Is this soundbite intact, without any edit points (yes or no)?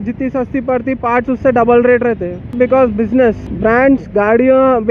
no